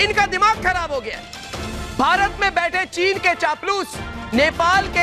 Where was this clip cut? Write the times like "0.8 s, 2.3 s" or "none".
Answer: none